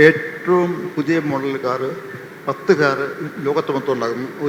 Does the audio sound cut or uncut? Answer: uncut